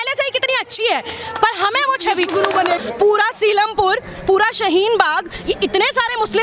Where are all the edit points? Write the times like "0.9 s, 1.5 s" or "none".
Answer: 2.8 s